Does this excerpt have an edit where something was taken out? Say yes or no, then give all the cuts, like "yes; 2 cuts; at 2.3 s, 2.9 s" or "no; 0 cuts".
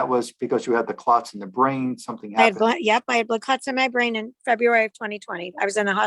no; 0 cuts